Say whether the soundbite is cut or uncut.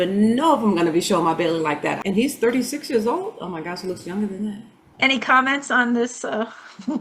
cut